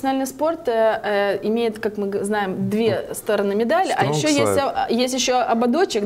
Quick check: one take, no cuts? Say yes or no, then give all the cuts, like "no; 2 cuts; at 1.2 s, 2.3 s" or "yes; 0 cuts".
yes; 0 cuts